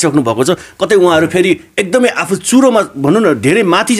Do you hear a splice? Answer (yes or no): no